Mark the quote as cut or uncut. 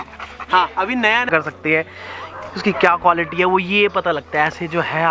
cut